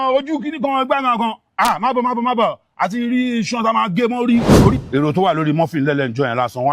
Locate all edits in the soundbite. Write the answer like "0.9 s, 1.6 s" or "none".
4.8 s